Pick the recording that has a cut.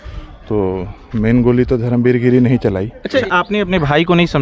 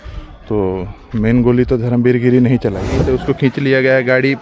second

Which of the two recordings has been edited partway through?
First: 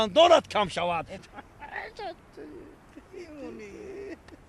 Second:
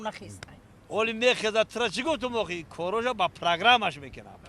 second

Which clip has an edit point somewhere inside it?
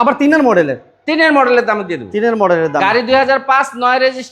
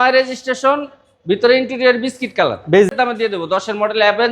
second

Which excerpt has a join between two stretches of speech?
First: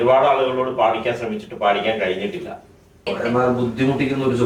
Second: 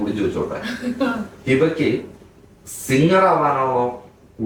first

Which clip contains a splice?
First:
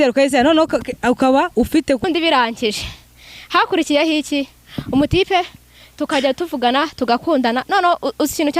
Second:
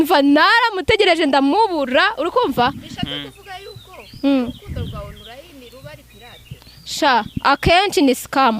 first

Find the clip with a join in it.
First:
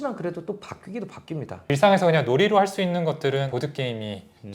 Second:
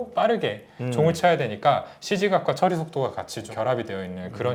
first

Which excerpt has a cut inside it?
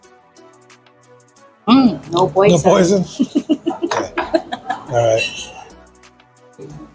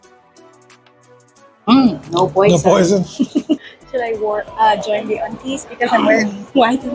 second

